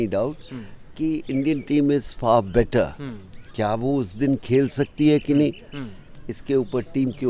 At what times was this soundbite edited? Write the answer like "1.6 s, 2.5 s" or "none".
none